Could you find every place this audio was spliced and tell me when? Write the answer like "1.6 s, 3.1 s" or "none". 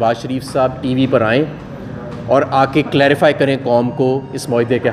none